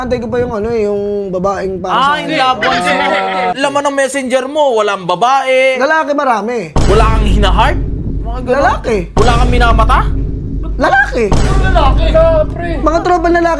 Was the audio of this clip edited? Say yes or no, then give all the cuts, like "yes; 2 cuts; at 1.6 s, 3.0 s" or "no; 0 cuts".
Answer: yes; 1 cut; at 3.6 s